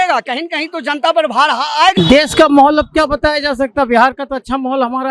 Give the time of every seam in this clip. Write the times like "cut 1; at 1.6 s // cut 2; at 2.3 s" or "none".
cut 1; at 1.9 s